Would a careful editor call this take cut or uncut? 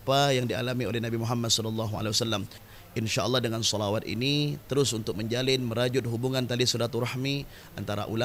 cut